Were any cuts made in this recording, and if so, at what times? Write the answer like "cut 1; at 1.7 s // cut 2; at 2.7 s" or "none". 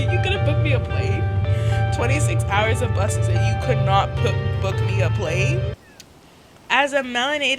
cut 1; at 5.8 s